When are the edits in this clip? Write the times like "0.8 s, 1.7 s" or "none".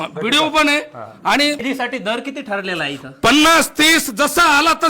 1.6 s